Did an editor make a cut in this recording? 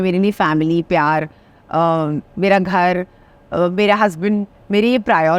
no; 0 cuts

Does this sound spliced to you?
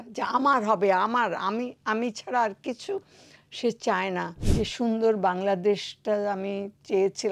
yes; 1 cut; at 4.4 s

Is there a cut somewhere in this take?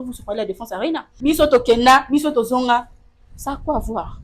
yes; 1 cut; at 1.1 s

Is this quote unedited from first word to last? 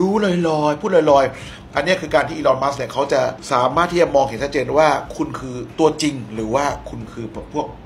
yes; 0 cuts

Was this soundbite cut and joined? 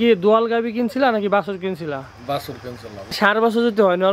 yes; 1 cut; at 3.2 s

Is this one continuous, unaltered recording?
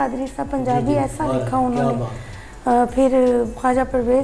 yes; 0 cuts

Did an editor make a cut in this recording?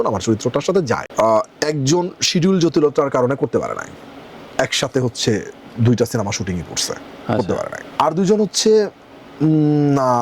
yes; 2 cuts; at 1.1 s, 7.8 s

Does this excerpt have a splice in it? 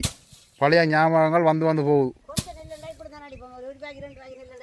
no; 0 cuts

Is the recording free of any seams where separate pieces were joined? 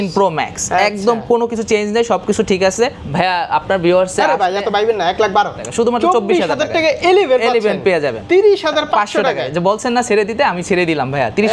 no; 3 cuts; at 3.0 s, 5.7 s, 8.2 s

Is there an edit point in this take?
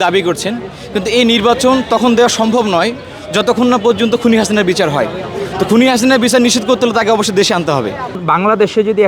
yes; 1 cut; at 7.9 s

